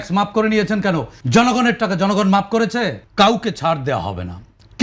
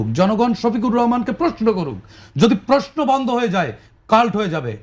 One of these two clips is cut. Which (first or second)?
first